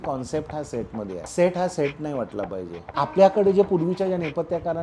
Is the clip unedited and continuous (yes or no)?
no